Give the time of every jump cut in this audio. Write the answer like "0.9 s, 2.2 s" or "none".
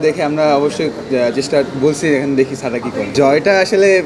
3.0 s